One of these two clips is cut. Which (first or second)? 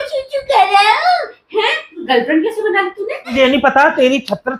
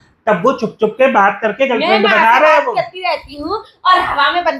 first